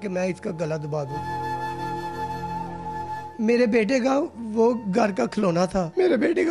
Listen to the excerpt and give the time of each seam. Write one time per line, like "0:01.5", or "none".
none